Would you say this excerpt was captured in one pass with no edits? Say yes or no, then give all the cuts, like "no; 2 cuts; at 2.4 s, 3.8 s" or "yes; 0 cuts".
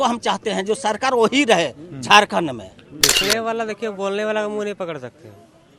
no; 1 cut; at 3.2 s